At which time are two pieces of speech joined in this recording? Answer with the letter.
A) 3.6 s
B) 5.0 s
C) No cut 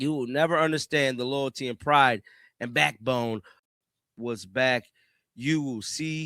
A